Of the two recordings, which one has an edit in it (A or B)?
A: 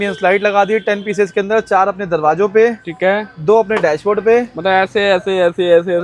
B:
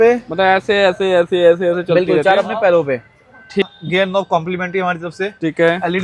B